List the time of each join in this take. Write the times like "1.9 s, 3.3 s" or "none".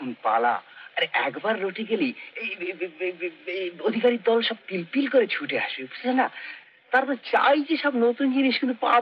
none